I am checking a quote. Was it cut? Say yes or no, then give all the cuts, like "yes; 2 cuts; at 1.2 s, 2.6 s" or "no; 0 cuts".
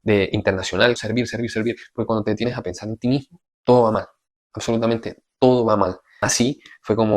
yes; 2 cuts; at 1.0 s, 6.1 s